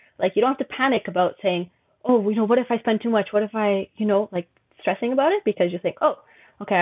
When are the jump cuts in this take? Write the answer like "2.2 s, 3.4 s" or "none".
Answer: none